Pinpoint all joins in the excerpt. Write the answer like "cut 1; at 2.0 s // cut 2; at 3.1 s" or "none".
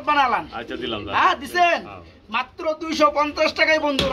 none